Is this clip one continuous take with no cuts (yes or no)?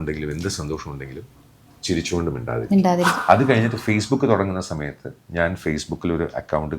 no